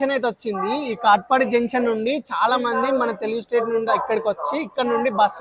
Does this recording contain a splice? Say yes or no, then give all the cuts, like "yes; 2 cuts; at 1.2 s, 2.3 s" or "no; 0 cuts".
no; 0 cuts